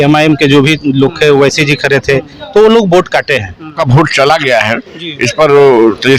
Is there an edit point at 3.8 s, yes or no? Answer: yes